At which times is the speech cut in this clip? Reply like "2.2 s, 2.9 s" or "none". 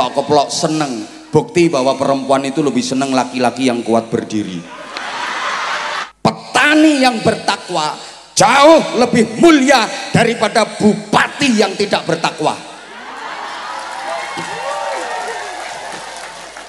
6.0 s